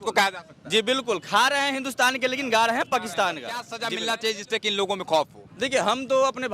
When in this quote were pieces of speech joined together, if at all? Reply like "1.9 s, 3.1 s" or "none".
3.7 s

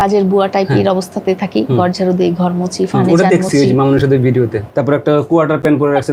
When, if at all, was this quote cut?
4.7 s

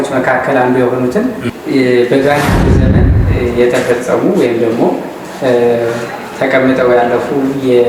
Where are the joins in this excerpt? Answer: 1.5 s

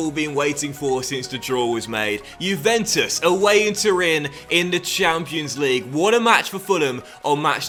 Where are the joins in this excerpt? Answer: none

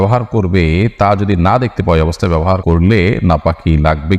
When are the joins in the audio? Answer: 2.6 s

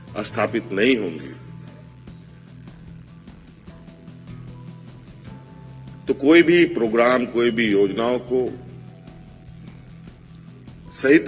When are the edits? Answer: 1.9 s, 6.0 s

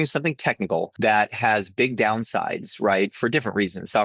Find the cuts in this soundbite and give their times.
0.9 s

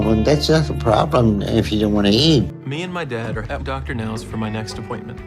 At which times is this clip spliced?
2.6 s

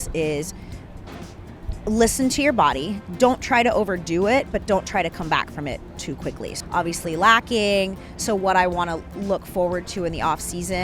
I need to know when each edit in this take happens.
6.5 s

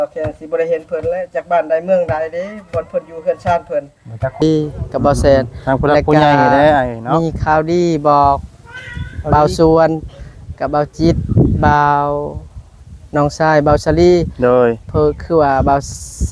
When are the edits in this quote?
4.4 s

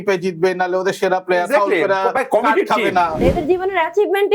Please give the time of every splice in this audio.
3.2 s

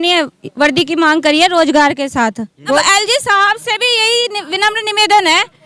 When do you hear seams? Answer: 2.8 s

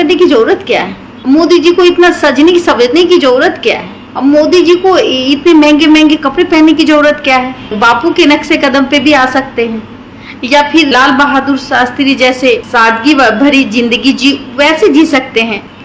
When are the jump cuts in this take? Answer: none

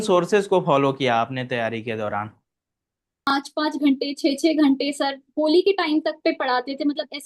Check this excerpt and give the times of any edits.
3.3 s

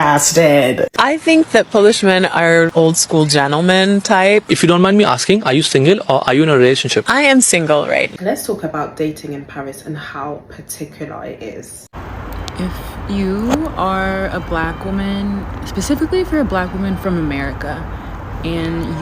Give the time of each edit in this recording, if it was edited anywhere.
0.9 s, 8.1 s, 11.9 s

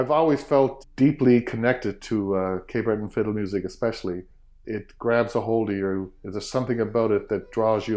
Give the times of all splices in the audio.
4.5 s

